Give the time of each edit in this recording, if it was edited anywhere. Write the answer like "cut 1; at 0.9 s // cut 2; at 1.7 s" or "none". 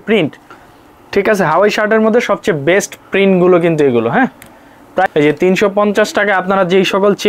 cut 1; at 5.1 s